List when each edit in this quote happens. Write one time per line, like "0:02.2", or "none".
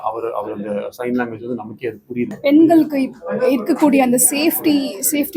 0:02.3